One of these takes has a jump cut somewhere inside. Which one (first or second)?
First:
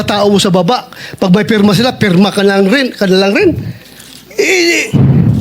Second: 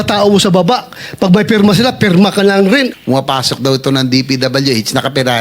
second